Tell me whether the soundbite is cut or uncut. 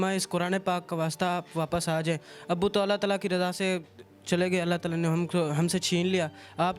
uncut